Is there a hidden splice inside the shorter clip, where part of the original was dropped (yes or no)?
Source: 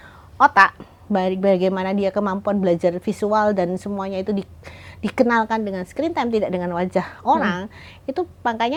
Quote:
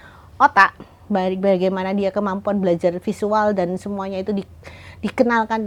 no